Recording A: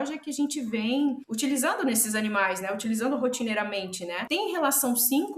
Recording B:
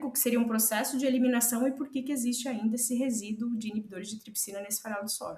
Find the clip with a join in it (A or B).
A